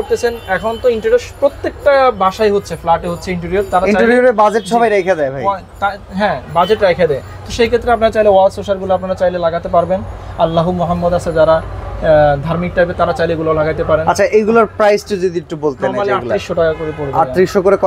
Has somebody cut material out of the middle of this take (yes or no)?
no